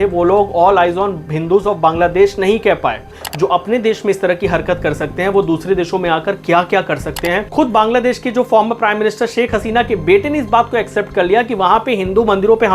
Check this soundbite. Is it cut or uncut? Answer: cut